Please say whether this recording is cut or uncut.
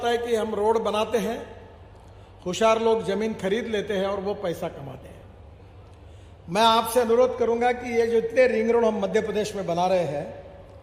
uncut